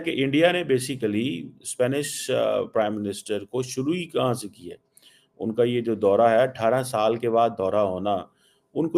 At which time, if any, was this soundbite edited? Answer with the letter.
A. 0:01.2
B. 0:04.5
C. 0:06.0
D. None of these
B